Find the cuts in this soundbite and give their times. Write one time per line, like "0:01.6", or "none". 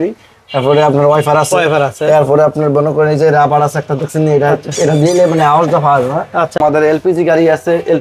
0:06.6